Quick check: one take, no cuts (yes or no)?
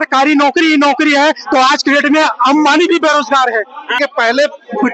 no